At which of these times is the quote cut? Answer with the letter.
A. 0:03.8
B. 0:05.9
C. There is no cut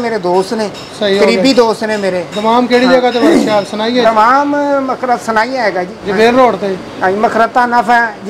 B